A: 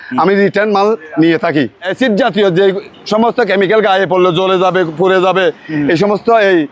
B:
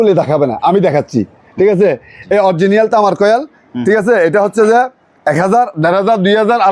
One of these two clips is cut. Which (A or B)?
A